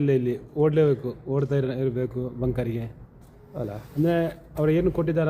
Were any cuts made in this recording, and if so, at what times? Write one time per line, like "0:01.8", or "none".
none